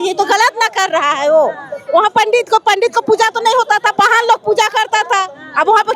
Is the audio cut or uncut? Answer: uncut